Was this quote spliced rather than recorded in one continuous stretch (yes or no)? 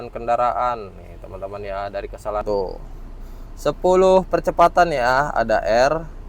yes